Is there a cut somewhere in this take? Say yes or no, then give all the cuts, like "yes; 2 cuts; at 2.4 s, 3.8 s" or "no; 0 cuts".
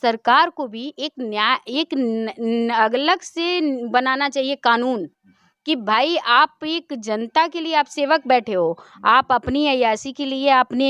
no; 0 cuts